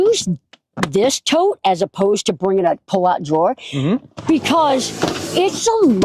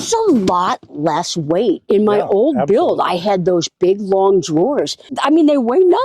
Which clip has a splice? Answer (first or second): second